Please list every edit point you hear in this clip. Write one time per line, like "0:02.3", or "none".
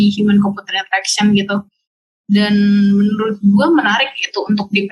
none